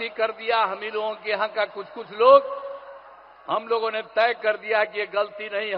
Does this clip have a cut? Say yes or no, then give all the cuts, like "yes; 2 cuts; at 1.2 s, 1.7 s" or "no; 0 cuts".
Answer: no; 0 cuts